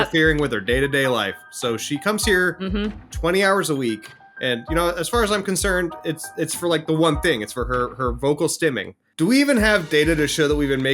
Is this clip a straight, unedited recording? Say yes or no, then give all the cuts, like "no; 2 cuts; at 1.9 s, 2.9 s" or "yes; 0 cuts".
no; 1 cut; at 9.1 s